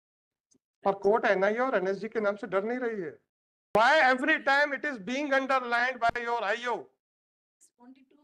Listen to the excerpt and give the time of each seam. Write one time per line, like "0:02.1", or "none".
0:03.8